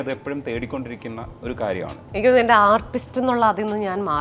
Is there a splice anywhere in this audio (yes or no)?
yes